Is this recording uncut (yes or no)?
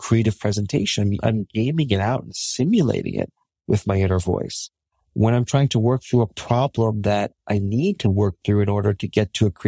no